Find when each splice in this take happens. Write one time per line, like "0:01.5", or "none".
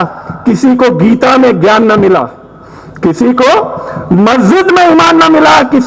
none

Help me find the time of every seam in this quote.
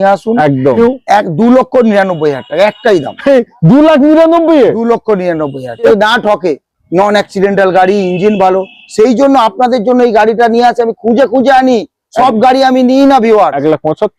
0:00.8
0:05.9

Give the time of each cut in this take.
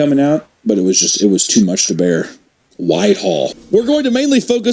0:03.6

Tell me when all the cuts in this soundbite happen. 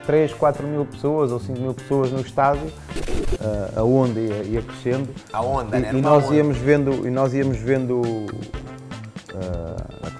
0:03.0

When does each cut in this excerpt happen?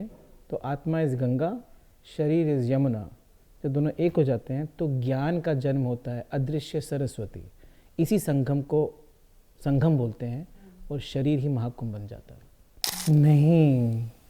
0:12.9

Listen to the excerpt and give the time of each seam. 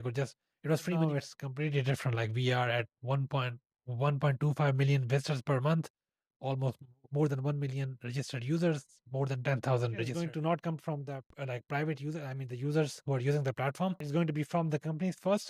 0:01.0
0:10.1

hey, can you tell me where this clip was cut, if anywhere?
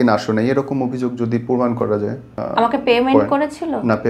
none

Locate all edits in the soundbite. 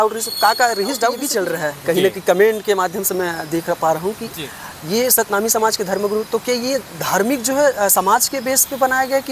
0:01.2

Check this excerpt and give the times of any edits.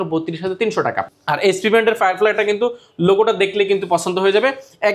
0:01.0

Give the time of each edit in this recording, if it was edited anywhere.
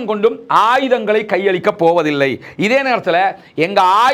none

